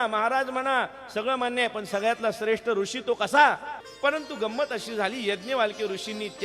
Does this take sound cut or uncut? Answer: cut